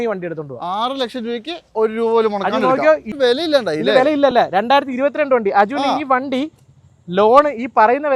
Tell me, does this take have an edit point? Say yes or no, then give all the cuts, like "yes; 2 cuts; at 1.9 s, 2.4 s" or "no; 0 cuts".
yes; 1 cut; at 3.1 s